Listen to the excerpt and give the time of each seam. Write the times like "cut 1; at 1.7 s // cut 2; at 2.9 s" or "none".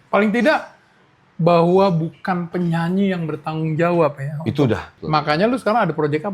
cut 1; at 4.9 s